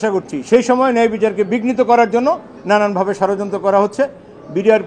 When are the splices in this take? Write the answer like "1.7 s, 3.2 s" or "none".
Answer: none